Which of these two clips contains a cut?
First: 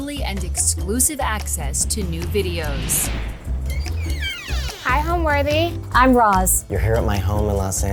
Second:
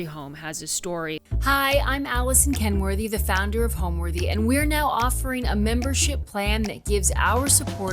second; 1 cut; at 1.3 s

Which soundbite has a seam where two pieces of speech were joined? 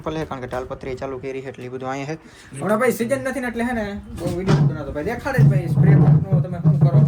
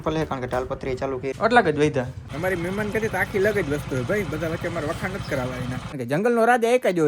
second; 3 cuts; at 1.3 s, 2.2 s, 5.9 s

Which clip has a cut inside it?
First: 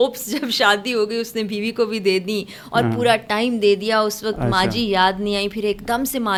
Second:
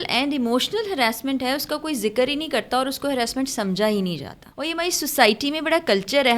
second; 1 cut; at 4.5 s

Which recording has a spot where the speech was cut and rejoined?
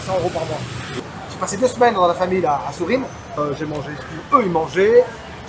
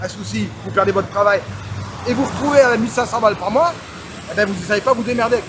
first; 2 cuts; at 1.0 s, 3.4 s

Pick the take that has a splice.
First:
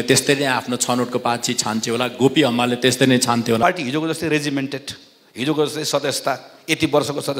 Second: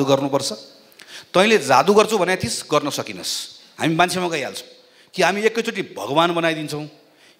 first; 1 cut; at 3.6 s

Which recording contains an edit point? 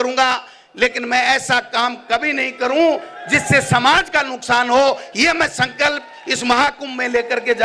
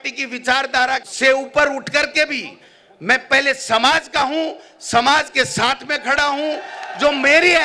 second; 1 cut; at 1.0 s

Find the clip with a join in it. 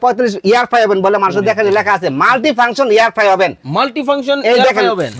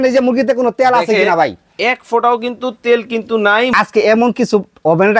second; 1 cut; at 3.7 s

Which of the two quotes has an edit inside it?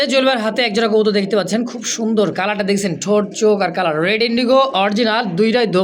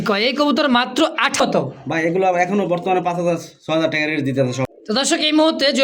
second; 2 cuts; at 1.4 s, 4.6 s

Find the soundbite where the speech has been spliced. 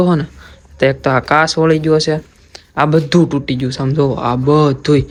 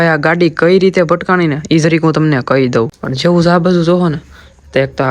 second; 1 cut; at 3.0 s

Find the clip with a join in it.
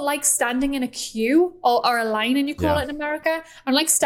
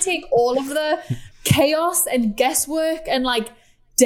second; 1 cut; at 1.1 s

